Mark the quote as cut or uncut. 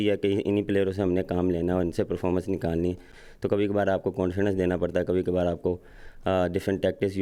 uncut